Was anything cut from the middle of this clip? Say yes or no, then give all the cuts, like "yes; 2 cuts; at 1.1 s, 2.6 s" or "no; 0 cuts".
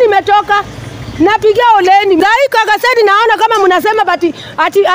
yes; 1 cut; at 2.2 s